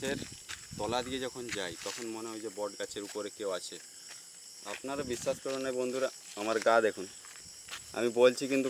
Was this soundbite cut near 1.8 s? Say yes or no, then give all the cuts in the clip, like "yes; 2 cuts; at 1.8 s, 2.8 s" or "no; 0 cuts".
no; 0 cuts